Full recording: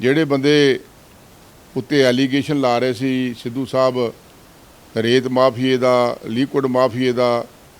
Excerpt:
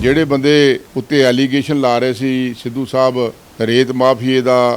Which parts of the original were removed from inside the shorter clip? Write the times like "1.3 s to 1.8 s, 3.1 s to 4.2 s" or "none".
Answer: 0.9 s to 1.7 s, 4.2 s to 4.8 s